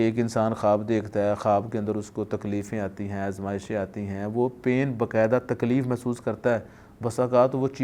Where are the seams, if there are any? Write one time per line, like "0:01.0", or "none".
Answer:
none

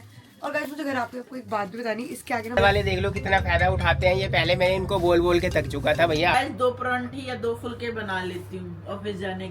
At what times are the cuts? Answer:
0:02.6
0:06.3

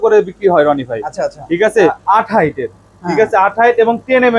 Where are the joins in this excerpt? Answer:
0:02.0

